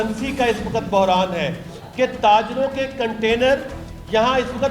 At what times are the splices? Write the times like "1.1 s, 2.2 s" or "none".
none